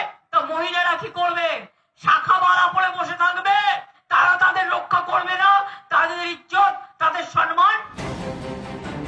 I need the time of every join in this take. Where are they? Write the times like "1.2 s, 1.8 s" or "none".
7.9 s